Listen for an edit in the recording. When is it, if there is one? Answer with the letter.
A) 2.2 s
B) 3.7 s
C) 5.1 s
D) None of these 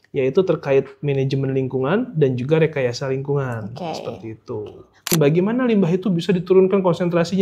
C